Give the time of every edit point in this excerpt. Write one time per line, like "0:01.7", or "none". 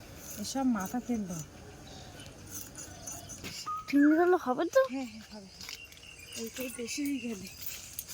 0:03.4